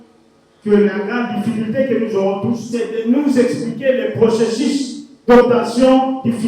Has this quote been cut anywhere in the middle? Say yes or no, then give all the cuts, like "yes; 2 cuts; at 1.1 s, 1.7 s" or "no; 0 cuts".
yes; 1 cut; at 2.6 s